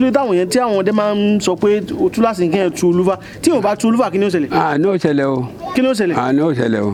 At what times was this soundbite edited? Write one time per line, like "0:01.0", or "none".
none